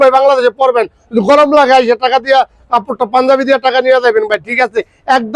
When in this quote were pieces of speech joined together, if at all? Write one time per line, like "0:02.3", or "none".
none